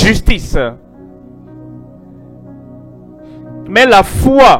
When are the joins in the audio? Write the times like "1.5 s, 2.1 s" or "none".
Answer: 1.4 s, 3.2 s